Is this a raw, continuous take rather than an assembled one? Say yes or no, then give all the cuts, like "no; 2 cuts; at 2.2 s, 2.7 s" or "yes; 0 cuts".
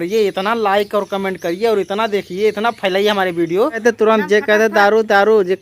no; 1 cut; at 3.8 s